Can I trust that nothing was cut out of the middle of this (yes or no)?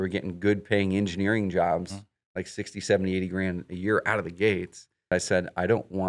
no